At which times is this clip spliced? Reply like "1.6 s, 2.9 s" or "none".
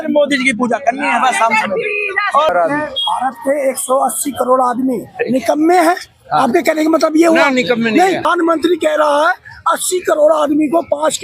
2.5 s, 8.3 s